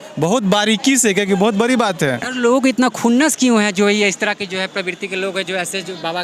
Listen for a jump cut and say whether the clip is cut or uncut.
cut